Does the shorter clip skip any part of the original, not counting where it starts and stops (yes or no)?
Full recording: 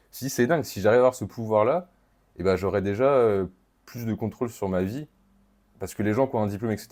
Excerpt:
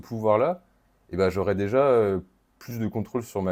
no